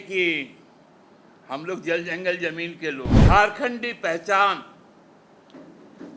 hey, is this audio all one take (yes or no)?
no